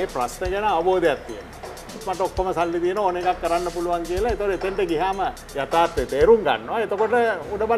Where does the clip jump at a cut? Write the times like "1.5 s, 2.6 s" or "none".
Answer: 2.1 s, 5.5 s